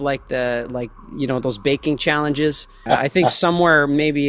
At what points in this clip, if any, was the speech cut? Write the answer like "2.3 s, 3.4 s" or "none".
2.8 s